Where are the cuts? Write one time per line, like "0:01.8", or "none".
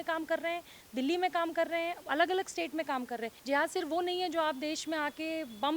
0:03.3